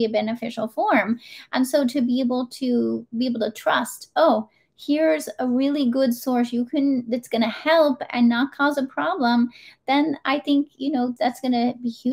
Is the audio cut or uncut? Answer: cut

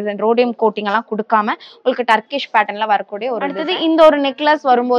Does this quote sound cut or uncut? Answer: cut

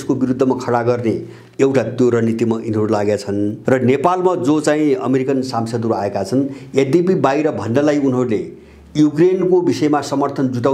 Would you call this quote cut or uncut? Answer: cut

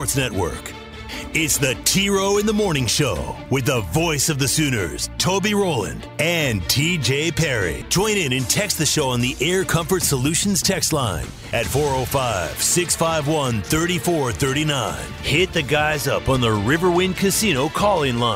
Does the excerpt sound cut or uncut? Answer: uncut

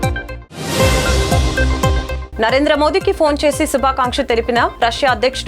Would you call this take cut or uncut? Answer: cut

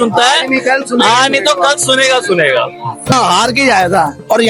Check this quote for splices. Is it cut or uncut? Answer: cut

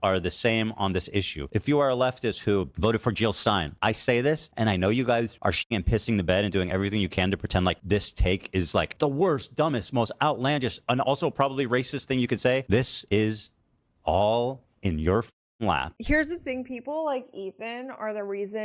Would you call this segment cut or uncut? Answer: cut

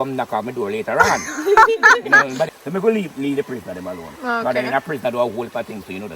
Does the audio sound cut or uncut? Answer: cut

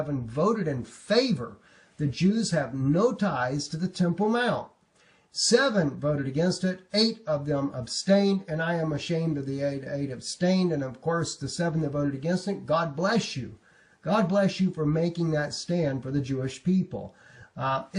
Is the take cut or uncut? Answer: uncut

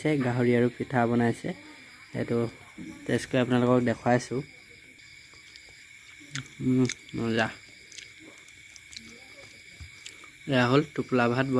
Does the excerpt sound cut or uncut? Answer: uncut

